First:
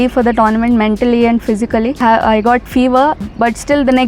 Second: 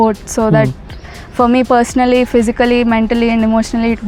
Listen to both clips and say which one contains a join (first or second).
first